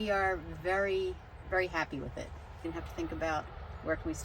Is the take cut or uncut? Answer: cut